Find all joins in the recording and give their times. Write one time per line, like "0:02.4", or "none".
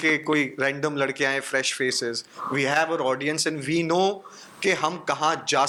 none